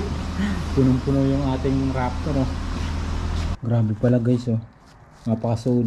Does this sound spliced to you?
yes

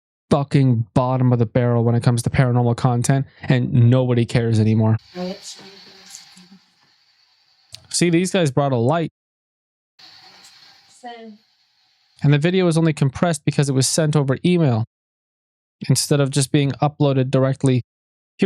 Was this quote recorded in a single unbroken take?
yes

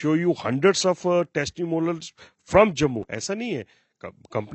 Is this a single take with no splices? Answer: yes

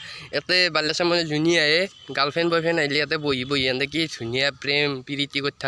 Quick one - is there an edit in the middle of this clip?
no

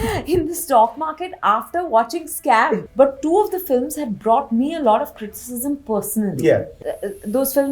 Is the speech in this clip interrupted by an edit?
yes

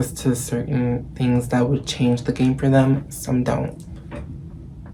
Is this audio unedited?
yes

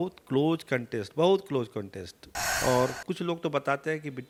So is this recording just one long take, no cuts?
yes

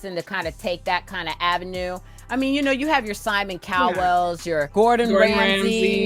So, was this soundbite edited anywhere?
yes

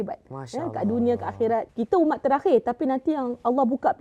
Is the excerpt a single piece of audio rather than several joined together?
no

